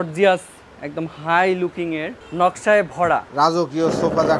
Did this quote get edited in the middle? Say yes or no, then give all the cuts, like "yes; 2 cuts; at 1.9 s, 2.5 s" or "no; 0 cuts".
yes; 2 cuts; at 2.2 s, 3.3 s